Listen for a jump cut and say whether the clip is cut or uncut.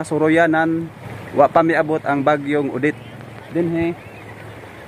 uncut